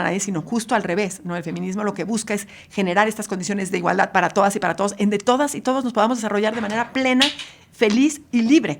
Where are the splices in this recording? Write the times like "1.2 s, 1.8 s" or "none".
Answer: none